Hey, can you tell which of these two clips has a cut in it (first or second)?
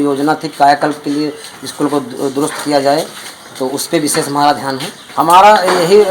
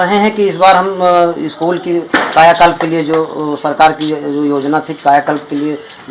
first